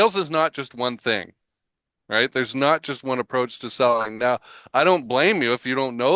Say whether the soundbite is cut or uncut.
uncut